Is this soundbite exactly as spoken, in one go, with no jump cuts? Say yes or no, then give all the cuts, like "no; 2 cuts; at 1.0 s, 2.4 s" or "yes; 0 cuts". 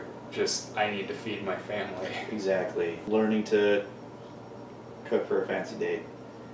no; 1 cut; at 3.0 s